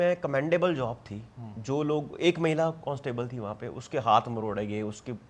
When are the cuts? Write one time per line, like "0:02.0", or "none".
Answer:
none